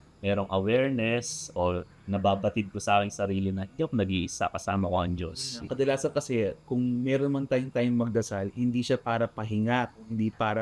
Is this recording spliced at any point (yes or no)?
yes